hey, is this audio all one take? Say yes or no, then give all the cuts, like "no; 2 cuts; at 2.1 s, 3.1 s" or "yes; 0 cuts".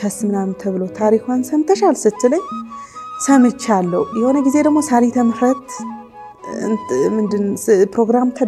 yes; 0 cuts